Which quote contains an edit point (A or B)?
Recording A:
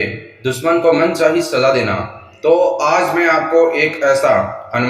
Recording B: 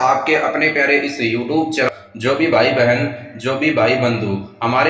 B